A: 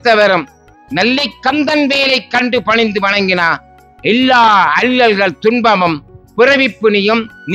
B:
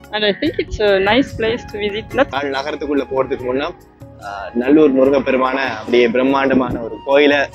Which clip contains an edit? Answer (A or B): B